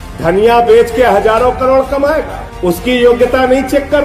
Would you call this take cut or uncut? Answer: uncut